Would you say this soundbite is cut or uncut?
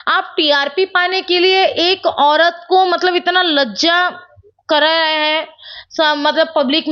uncut